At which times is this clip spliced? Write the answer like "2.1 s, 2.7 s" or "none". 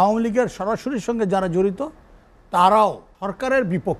3.1 s